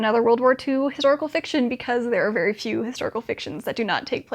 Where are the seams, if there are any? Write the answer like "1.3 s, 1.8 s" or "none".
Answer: none